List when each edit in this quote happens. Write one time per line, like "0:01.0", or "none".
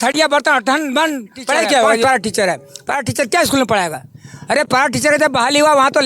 0:02.0